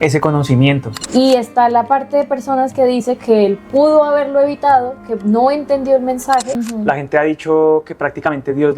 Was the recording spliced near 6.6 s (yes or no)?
yes